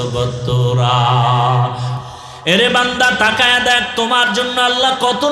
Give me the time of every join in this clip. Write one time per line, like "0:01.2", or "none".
0:01.9